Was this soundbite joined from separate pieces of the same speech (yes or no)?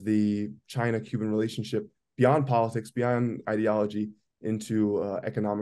no